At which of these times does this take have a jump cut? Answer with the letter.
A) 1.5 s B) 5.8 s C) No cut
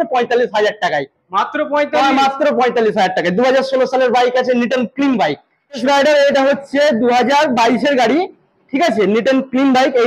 B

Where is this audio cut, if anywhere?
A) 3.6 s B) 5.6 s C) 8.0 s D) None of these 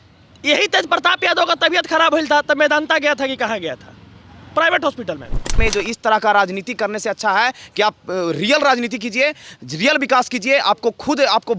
B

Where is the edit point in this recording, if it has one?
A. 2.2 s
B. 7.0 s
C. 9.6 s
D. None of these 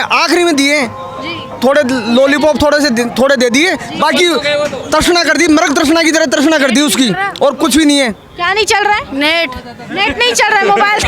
D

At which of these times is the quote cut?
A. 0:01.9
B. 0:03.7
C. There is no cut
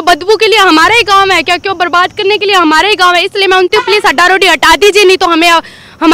B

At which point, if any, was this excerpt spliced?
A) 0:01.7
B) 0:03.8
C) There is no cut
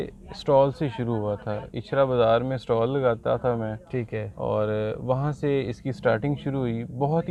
C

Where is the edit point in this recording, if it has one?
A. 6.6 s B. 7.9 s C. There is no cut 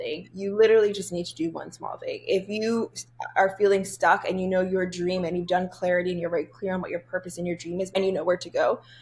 B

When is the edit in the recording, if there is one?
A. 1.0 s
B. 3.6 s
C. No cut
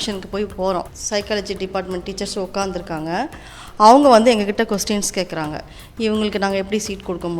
A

